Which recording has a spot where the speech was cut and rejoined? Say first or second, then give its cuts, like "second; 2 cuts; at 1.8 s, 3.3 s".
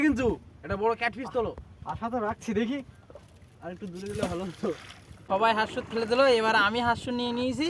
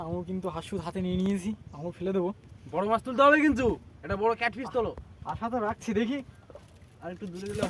first; 1 cut; at 5.2 s